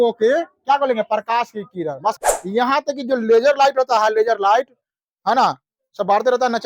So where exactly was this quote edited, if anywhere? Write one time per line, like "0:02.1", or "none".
0:02.2